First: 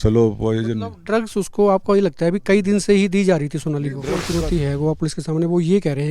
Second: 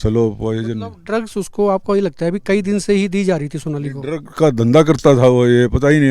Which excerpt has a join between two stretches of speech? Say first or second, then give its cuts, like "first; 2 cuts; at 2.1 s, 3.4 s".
first; 1 cut; at 4.2 s